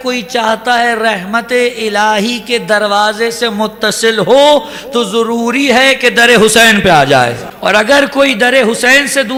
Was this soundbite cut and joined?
no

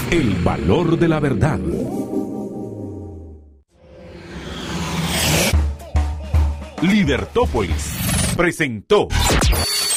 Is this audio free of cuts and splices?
yes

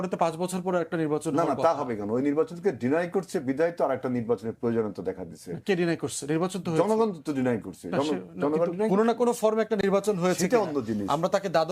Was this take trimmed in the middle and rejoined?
no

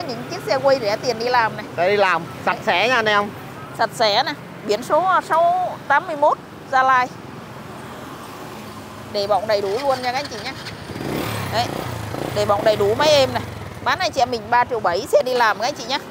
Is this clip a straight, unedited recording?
yes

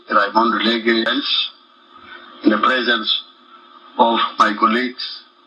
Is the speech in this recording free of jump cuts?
no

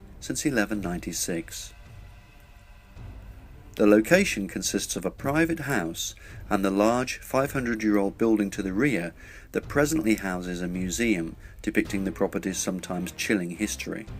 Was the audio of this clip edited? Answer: yes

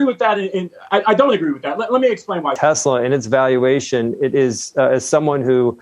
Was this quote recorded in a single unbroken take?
no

